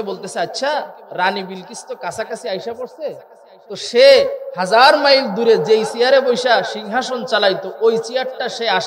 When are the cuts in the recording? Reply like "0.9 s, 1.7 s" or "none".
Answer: none